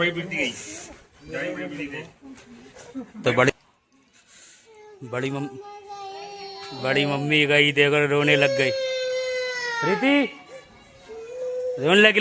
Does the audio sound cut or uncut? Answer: cut